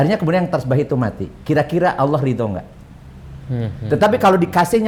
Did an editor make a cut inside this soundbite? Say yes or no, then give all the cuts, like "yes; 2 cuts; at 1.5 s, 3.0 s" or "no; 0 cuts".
no; 0 cuts